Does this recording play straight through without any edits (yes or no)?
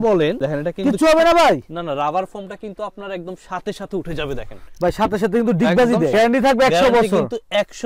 no